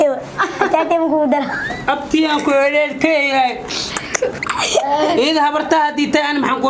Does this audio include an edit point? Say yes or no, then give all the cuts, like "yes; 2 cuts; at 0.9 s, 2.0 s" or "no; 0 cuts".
no; 0 cuts